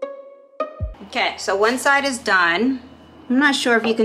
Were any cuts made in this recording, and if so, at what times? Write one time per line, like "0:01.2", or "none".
0:00.9